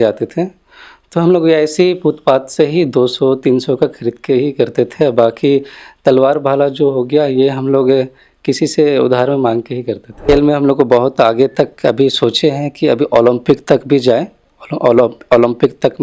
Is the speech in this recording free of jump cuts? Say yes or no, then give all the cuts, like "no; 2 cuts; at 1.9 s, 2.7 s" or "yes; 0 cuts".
no; 1 cut; at 10.1 s